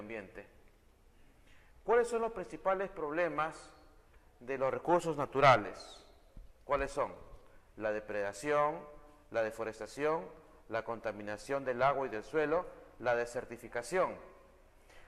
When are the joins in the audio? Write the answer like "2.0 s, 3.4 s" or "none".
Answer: 8.1 s